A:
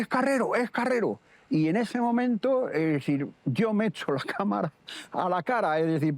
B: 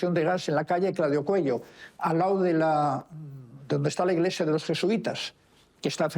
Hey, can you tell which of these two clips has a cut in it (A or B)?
A